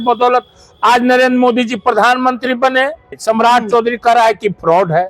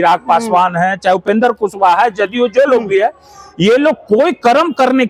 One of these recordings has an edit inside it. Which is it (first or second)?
first